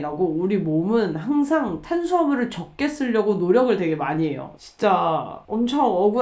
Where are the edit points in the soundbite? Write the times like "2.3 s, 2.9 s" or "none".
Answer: 4.5 s